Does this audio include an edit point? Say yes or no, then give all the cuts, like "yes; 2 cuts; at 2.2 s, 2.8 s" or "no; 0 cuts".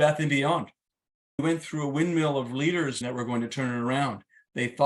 yes; 2 cuts; at 1.4 s, 3.0 s